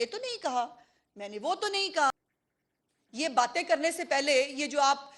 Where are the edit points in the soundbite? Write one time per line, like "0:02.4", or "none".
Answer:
0:02.1